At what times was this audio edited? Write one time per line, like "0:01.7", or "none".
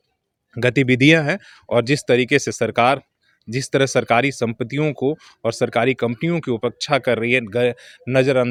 none